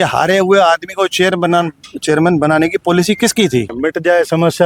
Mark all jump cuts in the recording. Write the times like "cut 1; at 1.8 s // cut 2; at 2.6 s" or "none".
cut 1; at 3.7 s